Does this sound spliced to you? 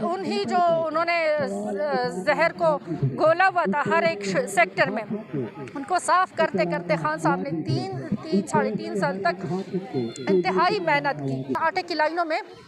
yes; 1 cut; at 11.6 s

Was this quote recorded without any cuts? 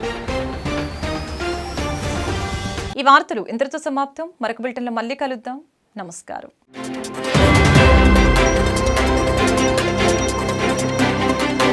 yes; 0 cuts

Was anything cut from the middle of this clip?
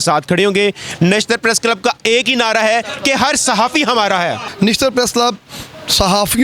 yes; 1 cut; at 4.5 s

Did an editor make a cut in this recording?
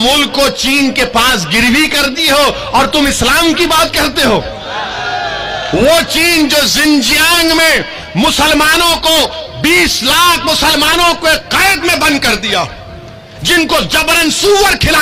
no; 0 cuts

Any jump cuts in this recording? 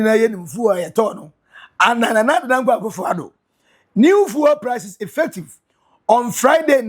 no; 0 cuts

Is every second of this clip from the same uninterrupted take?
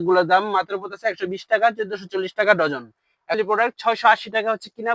no; 1 cut; at 3.4 s

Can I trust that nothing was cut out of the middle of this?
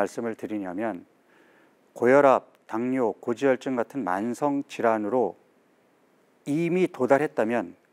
yes; 0 cuts

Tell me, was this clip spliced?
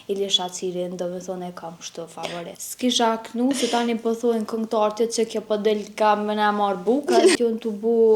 yes; 2 cuts; at 2.4 s, 7.3 s

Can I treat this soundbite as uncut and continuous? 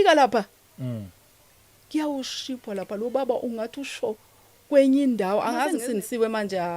no; 1 cut; at 5.7 s

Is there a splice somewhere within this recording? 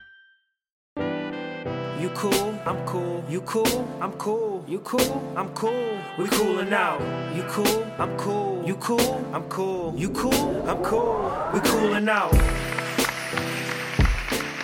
yes; 1 cut; at 0.9 s

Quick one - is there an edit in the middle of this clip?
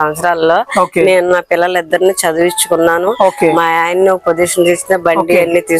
no; 0 cuts

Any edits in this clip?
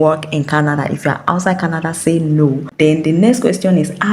yes; 1 cut; at 2.7 s

